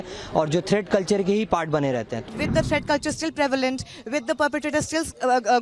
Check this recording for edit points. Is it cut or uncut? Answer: cut